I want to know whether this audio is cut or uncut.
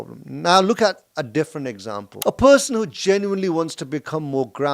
cut